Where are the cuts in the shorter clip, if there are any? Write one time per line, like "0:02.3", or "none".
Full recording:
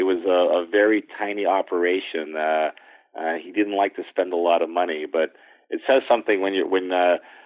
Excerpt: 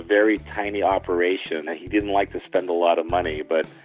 0:01.7